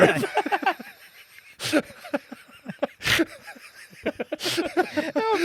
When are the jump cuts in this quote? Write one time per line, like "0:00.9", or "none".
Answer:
none